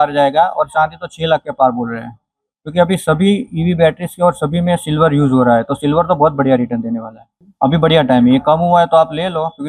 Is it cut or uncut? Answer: uncut